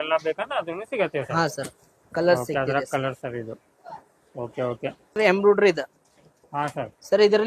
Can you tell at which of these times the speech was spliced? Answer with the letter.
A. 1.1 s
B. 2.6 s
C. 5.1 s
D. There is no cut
C